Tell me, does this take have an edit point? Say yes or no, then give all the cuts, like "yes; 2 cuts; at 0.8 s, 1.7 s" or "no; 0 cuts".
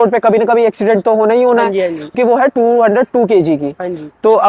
yes; 1 cut; at 2.1 s